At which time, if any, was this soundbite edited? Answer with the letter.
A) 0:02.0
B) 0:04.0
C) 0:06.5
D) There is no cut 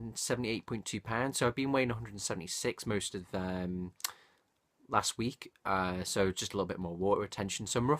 C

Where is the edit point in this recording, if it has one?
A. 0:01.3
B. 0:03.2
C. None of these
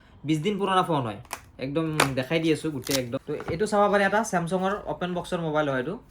B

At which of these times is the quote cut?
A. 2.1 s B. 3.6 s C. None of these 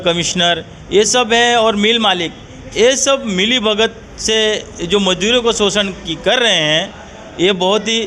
C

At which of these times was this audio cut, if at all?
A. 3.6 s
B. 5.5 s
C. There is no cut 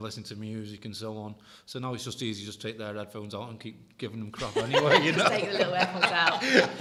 C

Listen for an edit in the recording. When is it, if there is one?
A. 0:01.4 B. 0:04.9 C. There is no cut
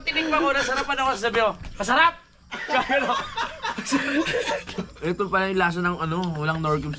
B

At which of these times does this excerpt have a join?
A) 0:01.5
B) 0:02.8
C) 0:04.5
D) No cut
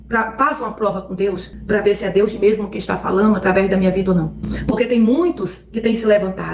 C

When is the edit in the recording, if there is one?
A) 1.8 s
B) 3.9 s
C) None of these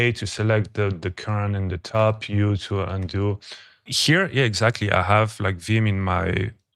B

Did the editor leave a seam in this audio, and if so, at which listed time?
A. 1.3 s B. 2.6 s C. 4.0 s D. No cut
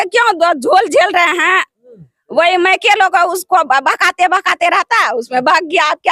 D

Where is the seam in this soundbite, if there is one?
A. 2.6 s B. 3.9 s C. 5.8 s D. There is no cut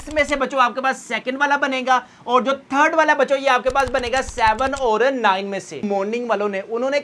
C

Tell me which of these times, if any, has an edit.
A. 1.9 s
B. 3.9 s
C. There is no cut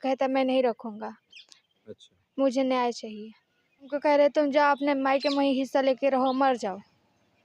B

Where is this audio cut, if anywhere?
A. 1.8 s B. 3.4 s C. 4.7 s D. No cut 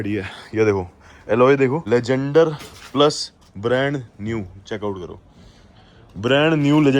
A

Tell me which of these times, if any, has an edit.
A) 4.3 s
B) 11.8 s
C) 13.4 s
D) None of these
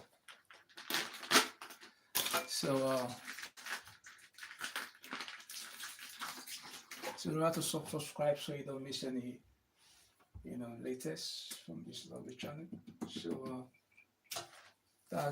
B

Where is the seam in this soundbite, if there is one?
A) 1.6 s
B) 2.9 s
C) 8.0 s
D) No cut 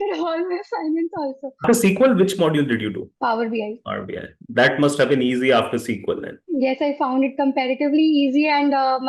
A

